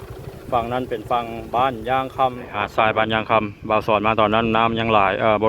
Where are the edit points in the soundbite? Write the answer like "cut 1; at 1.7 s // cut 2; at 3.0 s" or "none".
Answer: cut 1; at 2.4 s